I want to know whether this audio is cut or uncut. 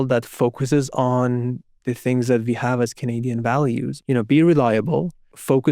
cut